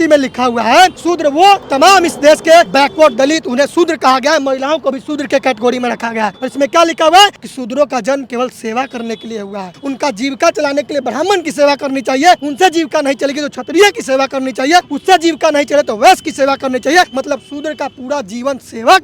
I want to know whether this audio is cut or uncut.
cut